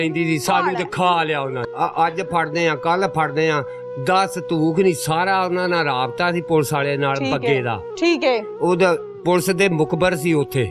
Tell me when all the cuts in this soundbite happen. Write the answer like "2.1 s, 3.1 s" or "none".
1.6 s